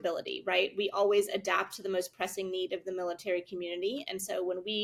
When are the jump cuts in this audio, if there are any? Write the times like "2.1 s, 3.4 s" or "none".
none